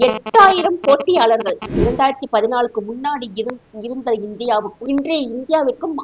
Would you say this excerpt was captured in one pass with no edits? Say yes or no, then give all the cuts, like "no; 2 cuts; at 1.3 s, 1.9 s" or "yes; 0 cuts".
no; 2 cuts; at 1.7 s, 4.8 s